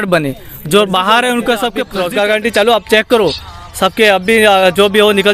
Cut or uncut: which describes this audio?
cut